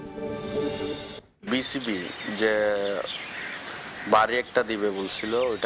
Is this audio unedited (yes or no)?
no